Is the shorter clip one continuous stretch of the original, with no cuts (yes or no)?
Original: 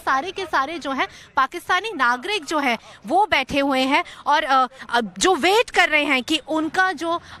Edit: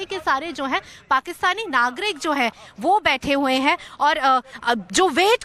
yes